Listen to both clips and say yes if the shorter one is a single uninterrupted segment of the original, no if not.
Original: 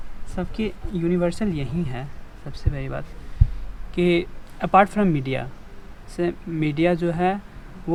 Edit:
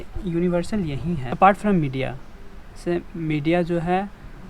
no